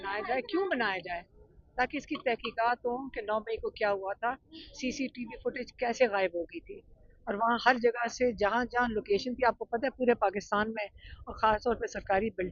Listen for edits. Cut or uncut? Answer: uncut